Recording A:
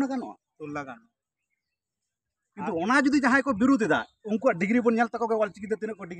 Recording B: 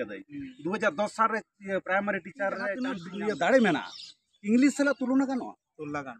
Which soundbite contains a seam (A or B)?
B